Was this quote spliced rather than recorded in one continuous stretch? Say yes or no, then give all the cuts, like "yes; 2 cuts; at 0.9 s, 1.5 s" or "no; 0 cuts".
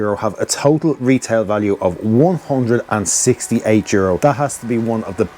yes; 1 cut; at 4.2 s